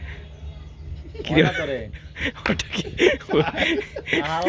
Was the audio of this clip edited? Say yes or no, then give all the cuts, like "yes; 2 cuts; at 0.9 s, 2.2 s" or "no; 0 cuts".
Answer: no; 0 cuts